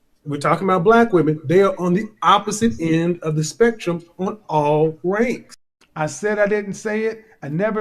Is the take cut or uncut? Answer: cut